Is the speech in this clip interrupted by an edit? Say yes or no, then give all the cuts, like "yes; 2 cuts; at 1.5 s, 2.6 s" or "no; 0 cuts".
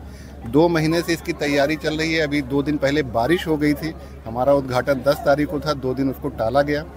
no; 0 cuts